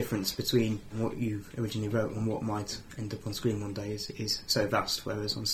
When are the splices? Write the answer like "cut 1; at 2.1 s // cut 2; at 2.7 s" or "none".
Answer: cut 1; at 0.9 s